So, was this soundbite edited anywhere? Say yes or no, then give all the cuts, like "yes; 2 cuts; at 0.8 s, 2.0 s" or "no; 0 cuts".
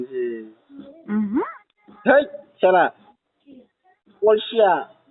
no; 0 cuts